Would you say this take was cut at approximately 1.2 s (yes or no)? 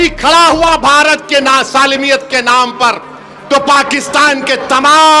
no